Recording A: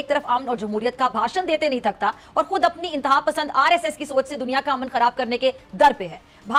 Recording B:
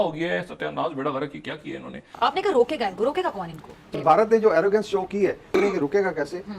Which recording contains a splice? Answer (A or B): B